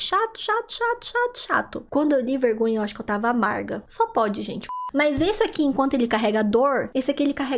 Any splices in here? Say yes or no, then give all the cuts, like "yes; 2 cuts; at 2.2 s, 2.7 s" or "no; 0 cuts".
yes; 2 cuts; at 1.8 s, 4.8 s